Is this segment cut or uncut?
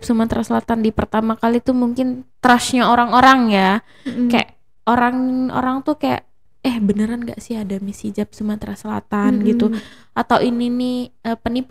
uncut